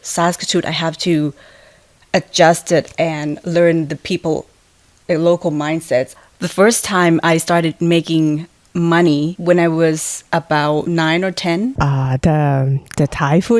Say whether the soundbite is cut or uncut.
cut